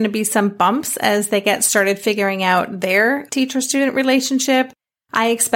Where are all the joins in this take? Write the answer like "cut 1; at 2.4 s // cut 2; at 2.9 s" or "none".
cut 1; at 3.3 s